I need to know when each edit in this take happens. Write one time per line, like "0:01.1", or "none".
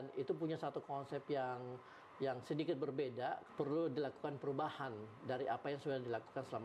0:03.4